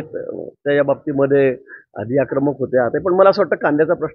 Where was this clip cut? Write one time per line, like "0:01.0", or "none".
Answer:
none

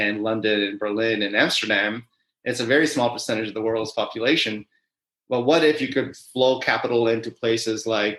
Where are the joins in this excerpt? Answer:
none

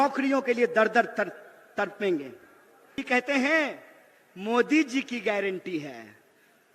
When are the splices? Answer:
0:03.0

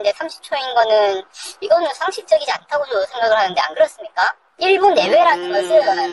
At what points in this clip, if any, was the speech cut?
0:04.5

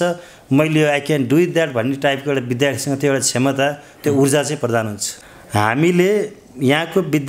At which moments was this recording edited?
0:05.2

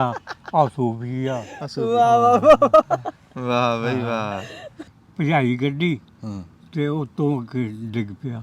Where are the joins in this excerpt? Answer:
0:04.8

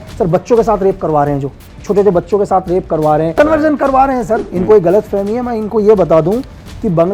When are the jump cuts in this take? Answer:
0:03.3
0:04.5

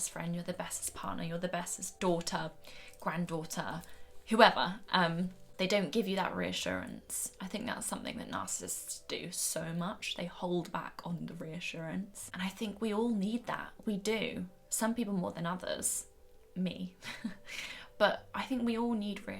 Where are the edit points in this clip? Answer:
0:01.9
0:05.4
0:12.2

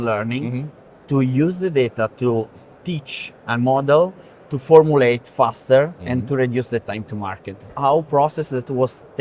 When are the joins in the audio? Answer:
0:07.7

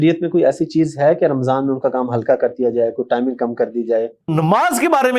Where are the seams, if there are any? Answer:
0:04.3

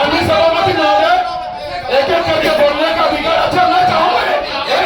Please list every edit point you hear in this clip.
none

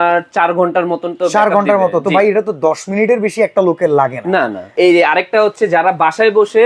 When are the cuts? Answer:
0:04.7

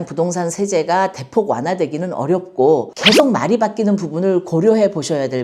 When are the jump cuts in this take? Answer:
0:02.9

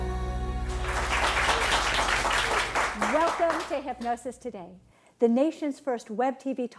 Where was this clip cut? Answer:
none

